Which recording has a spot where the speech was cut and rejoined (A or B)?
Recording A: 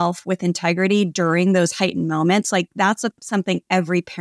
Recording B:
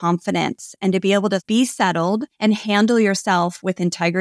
B